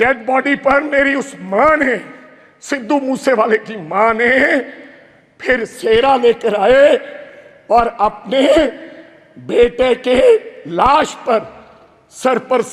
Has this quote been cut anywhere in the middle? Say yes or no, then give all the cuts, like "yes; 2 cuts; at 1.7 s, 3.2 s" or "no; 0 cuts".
no; 0 cuts